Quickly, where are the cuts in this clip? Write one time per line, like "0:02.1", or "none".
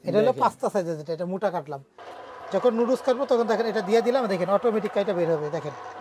0:01.9